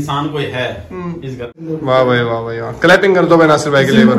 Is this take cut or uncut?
cut